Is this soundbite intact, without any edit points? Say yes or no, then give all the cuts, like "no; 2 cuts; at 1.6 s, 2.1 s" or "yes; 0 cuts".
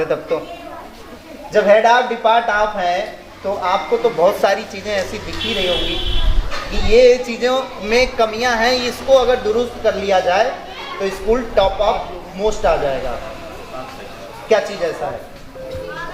yes; 0 cuts